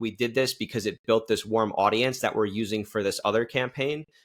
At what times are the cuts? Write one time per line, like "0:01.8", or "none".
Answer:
none